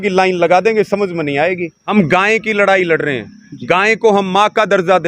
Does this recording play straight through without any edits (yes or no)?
no